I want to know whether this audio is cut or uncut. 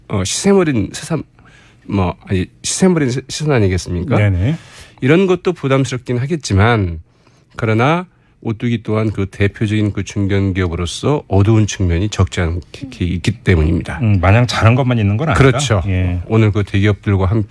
uncut